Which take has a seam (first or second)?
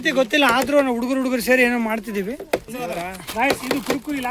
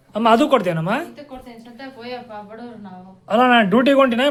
first